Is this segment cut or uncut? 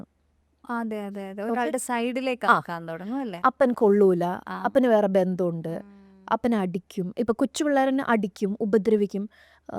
uncut